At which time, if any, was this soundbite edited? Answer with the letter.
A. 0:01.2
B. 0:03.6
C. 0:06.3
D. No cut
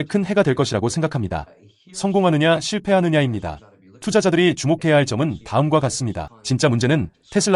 C